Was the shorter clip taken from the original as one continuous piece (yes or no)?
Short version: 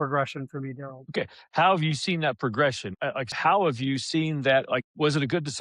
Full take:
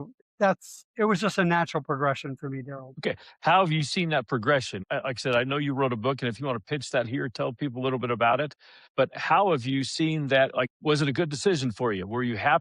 no